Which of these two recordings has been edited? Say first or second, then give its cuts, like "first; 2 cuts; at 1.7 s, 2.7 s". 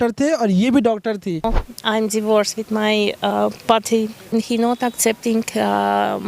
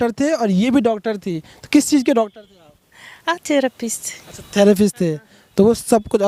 first; 2 cuts; at 1.6 s, 4.3 s